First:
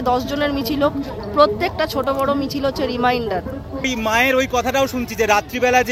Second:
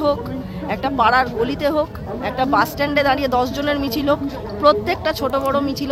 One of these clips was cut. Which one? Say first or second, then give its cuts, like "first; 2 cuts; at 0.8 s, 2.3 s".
first; 1 cut; at 3.9 s